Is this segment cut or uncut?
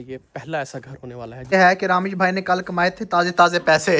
cut